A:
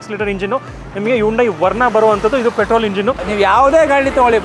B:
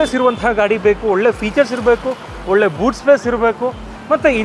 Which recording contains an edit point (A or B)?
A